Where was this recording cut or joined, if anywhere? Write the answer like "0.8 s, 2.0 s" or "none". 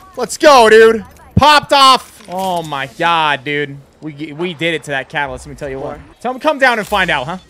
6.1 s